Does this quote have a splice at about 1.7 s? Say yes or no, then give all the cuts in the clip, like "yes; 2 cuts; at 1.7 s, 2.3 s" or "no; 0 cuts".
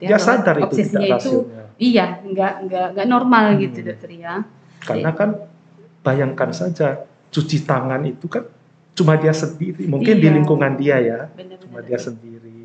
no; 0 cuts